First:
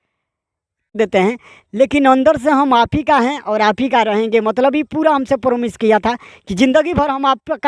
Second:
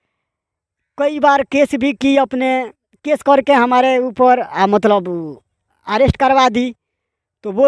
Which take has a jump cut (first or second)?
first